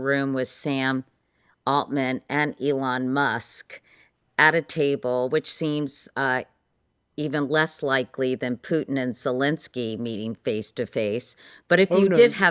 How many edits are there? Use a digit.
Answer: 0